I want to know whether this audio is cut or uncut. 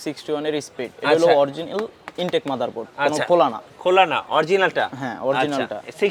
uncut